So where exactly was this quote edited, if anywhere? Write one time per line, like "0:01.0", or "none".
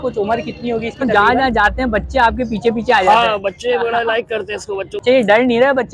0:01.0
0:05.0